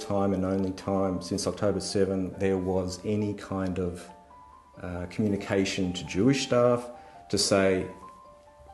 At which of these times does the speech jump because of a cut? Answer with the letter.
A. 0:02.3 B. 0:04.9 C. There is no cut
A